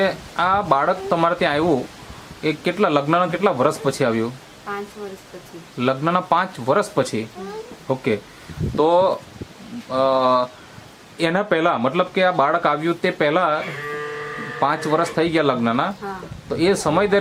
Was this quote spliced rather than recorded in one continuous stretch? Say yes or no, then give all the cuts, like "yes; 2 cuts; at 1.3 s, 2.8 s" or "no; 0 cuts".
no; 0 cuts